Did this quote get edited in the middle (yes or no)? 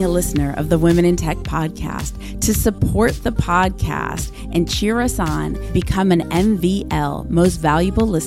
no